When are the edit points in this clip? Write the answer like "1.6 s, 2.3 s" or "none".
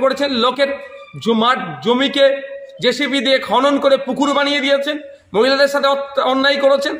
none